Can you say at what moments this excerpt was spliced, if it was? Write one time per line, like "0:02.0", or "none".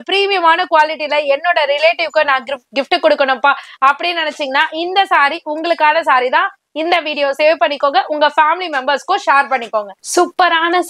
none